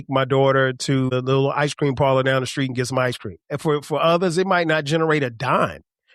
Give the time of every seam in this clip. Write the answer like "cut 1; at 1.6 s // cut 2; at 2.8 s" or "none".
cut 1; at 1.1 s // cut 2; at 3.5 s